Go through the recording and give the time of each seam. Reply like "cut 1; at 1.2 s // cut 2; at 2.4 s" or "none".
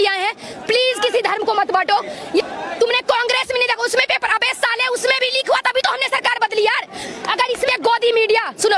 cut 1; at 2.5 s // cut 2; at 7.7 s